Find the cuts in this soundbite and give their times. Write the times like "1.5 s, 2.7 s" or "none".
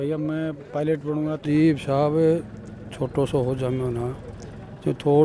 1.4 s